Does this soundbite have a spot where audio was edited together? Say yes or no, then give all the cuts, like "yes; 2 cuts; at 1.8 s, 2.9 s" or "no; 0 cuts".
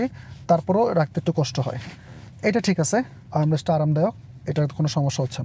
no; 0 cuts